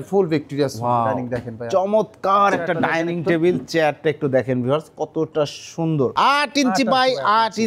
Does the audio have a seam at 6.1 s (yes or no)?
yes